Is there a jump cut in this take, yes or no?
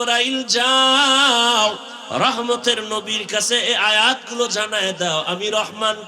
yes